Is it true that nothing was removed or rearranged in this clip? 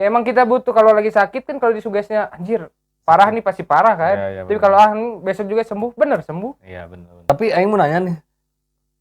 no; 1 cut; at 7.3 s

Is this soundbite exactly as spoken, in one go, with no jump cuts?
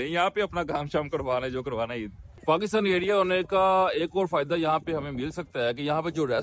yes; 0 cuts

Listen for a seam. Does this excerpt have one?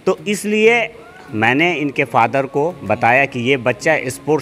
no; 0 cuts

